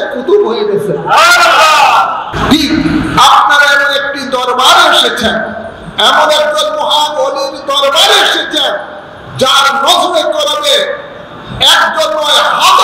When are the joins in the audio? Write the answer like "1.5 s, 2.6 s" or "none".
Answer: 2.3 s